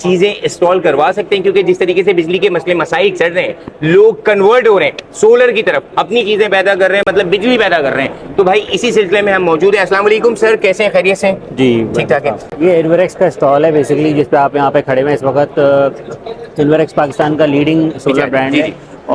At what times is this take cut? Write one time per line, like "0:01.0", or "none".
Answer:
none